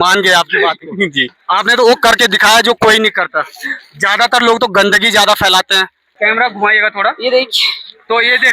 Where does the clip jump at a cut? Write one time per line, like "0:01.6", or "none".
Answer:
0:06.2